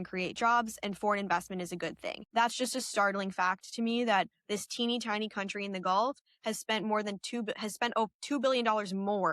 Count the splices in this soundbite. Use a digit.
1